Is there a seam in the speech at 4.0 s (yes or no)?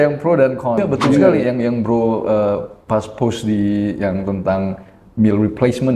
no